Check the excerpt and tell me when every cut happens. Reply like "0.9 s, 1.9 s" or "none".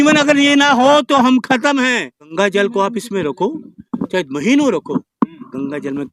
2.3 s